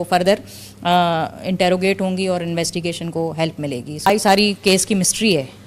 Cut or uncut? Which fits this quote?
cut